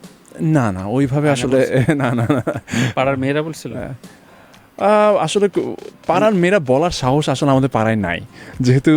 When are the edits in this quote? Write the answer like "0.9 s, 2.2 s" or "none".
none